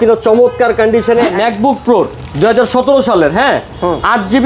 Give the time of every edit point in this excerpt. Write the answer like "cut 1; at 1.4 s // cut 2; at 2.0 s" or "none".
cut 1; at 1.4 s